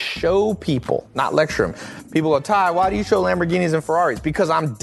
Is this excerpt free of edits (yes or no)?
no